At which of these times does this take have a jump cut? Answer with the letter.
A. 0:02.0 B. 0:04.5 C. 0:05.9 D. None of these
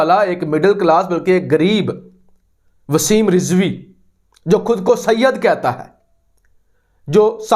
D